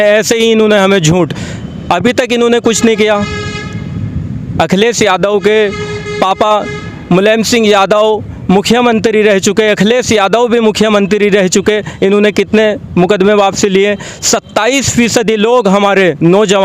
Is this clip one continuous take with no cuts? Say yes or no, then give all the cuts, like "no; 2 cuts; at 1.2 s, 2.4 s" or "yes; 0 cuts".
yes; 0 cuts